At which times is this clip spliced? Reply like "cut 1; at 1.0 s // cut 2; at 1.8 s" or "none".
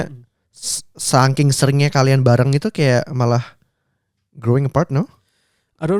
none

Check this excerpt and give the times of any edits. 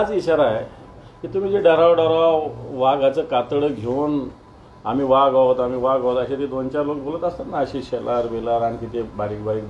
none

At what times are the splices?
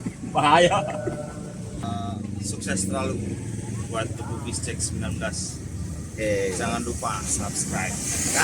cut 1; at 1.8 s

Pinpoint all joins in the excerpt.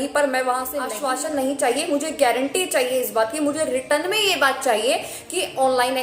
cut 1; at 0.9 s

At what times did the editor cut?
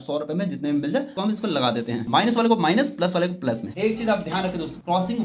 cut 1; at 1.1 s // cut 2; at 3.7 s

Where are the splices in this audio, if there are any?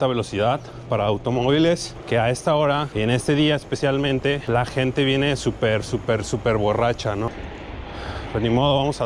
cut 1; at 1.9 s // cut 2; at 2.9 s // cut 3; at 4.4 s // cut 4; at 7.4 s

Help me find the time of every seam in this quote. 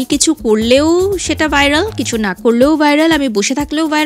none

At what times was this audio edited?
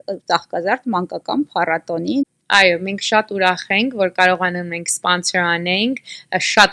cut 1; at 2.2 s

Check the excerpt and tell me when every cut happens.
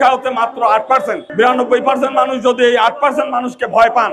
cut 1; at 1.2 s

